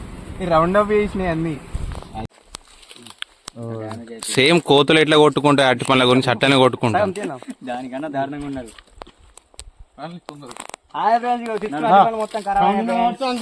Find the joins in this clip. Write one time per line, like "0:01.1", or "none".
0:02.3